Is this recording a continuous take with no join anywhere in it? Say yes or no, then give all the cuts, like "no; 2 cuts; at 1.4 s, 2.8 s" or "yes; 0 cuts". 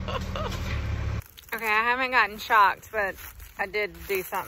no; 1 cut; at 1.3 s